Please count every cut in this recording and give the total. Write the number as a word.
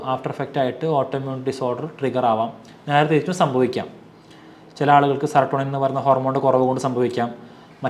zero